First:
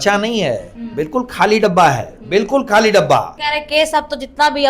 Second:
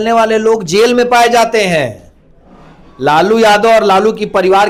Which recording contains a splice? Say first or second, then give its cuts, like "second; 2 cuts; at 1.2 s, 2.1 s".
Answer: first; 1 cut; at 3.3 s